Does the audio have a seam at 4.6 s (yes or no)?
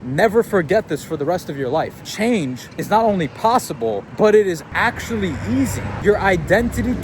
yes